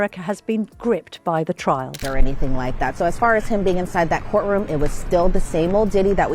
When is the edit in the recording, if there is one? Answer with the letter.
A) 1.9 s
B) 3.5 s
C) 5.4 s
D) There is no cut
A